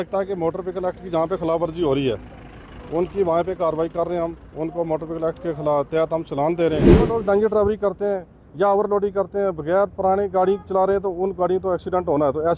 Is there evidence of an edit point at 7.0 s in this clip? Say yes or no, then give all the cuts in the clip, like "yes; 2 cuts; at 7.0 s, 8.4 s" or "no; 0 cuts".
yes; 1 cut; at 7.0 s